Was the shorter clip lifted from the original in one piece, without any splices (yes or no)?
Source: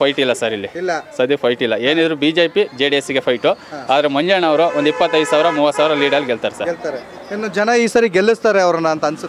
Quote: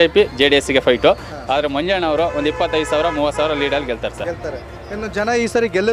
yes